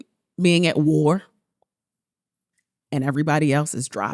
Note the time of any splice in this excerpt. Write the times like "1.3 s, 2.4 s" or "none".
none